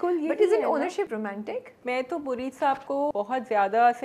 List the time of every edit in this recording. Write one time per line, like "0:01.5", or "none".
0:01.3
0:03.1